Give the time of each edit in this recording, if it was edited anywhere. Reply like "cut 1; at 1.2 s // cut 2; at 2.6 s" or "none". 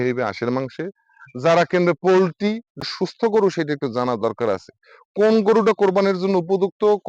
cut 1; at 2.8 s